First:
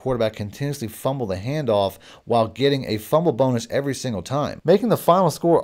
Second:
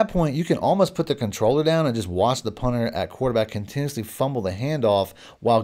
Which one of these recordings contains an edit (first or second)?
first